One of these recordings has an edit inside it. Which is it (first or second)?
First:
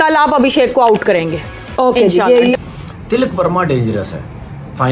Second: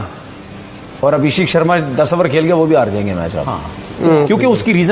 first